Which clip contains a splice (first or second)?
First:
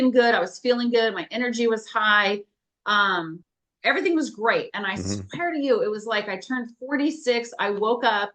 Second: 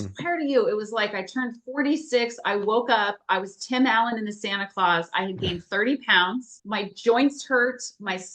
second